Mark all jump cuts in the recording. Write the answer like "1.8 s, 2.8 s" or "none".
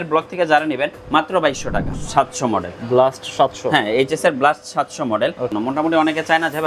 1.7 s, 5.5 s